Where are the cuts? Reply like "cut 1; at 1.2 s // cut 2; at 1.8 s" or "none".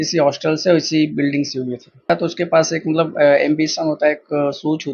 cut 1; at 2.1 s